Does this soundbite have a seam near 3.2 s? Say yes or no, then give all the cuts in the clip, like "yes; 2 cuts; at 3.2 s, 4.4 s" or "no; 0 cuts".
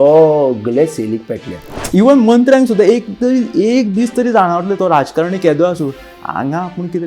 no; 1 cut; at 1.8 s